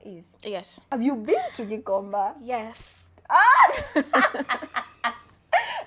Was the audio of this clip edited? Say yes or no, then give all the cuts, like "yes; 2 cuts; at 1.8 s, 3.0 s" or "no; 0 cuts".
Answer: no; 0 cuts